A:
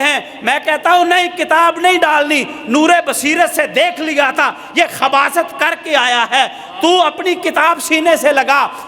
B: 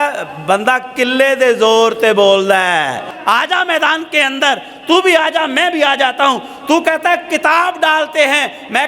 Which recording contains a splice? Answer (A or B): B